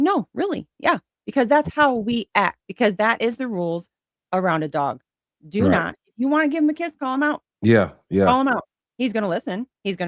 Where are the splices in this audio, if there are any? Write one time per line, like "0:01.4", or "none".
0:02.6
0:07.5